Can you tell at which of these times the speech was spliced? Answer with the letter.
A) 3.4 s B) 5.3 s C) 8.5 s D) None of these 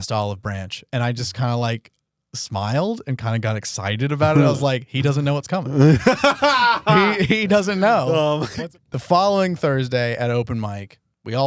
C